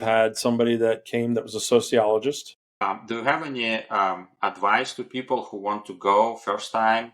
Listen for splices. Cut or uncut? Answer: cut